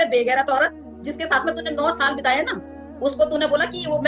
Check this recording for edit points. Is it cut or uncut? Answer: uncut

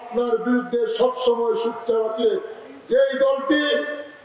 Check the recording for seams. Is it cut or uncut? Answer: uncut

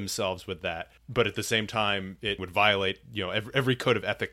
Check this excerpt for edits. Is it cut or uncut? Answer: cut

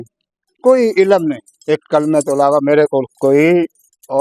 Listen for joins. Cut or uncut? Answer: uncut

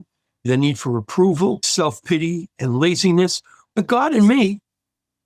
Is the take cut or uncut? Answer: cut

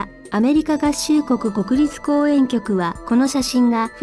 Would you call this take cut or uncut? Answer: cut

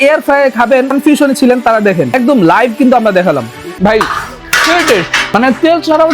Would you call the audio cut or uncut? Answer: cut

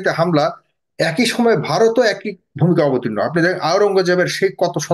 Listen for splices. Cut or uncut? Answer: uncut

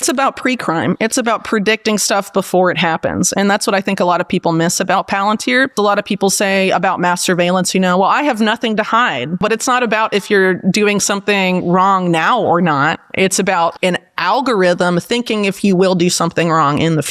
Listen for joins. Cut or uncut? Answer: cut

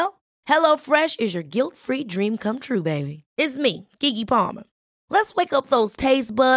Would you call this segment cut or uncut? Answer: uncut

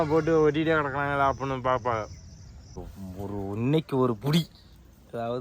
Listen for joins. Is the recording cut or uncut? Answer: cut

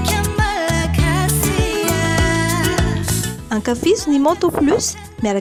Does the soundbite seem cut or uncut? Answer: uncut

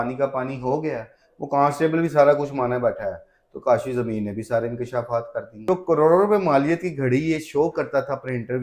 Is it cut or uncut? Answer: cut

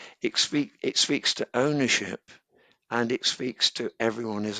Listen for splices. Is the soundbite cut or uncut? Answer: uncut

